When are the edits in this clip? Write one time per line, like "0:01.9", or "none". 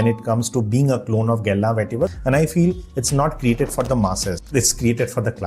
0:02.1
0:04.4